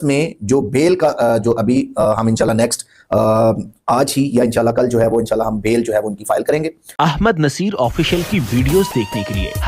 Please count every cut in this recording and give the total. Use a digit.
1